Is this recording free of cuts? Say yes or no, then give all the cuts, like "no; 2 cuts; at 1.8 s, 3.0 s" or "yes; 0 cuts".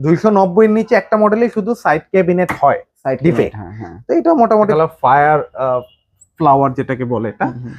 no; 1 cut; at 4.7 s